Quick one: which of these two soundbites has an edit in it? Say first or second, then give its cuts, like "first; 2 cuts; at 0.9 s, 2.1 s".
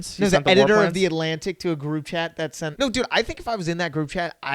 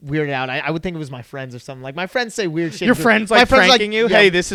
first; 1 cut; at 2.6 s